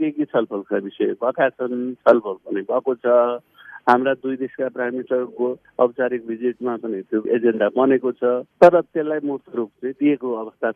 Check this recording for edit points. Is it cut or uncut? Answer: uncut